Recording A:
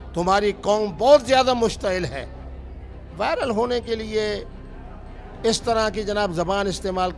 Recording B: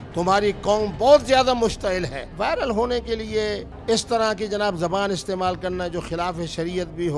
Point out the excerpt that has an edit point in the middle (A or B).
B